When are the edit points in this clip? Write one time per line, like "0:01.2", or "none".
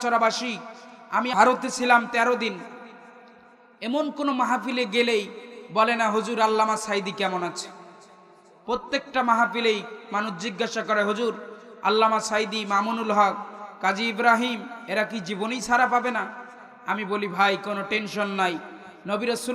0:01.3